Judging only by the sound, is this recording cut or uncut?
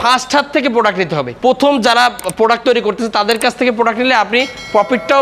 cut